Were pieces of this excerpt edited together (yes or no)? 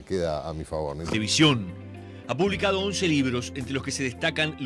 no